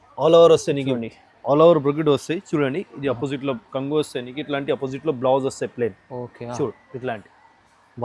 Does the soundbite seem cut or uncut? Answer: uncut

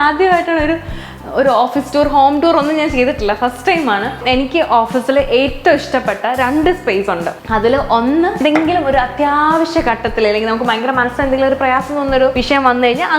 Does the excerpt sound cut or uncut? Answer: cut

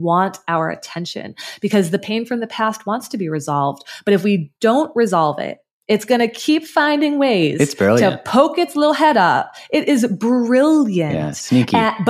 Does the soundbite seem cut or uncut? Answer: uncut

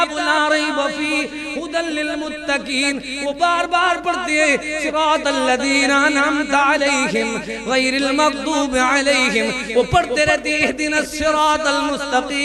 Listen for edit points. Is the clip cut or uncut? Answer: uncut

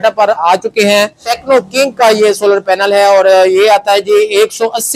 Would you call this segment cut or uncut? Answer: cut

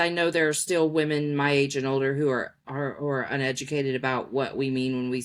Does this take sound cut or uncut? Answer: uncut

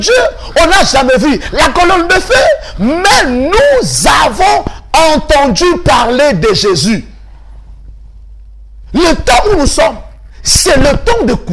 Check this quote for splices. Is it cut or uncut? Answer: uncut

